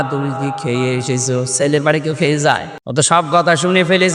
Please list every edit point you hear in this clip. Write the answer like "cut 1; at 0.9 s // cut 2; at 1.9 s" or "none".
cut 1; at 3.2 s